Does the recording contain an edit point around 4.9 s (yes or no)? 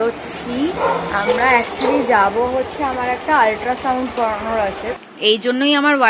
yes